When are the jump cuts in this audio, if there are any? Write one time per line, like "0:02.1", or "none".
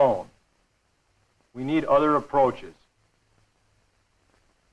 0:01.9